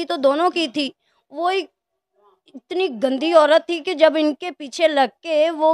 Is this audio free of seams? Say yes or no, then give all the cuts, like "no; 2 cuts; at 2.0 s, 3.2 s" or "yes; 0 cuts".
yes; 0 cuts